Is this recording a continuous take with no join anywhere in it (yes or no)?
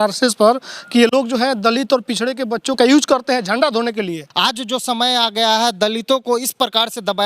no